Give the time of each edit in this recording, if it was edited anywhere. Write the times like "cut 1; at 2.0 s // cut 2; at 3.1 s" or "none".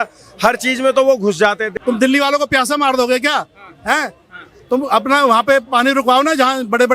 cut 1; at 1.7 s